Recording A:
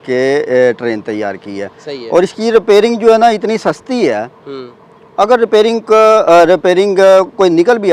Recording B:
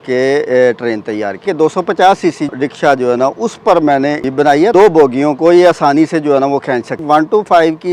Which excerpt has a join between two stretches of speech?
B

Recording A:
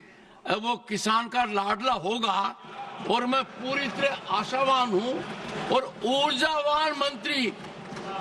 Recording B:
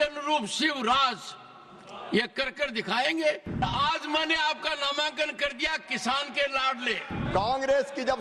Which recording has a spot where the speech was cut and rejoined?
B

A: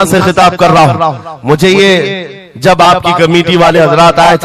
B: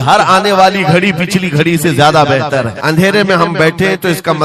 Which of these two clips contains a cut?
B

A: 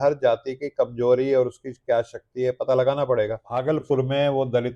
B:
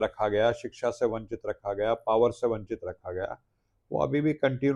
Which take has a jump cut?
A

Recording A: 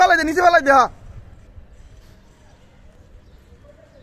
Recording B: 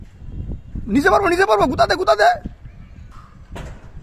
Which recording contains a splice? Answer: A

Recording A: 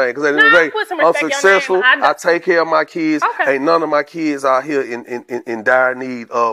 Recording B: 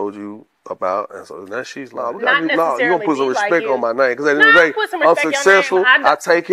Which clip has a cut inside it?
B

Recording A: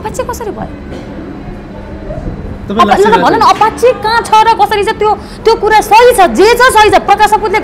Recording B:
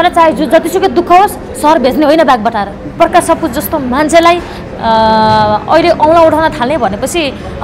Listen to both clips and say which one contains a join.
B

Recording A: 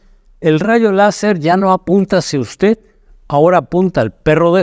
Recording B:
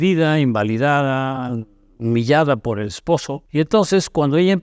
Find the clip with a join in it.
B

